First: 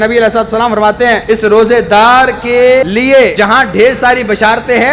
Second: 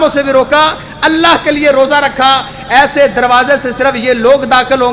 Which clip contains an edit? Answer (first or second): first